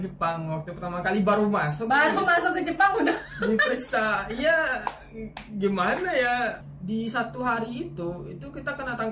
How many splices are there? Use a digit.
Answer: 1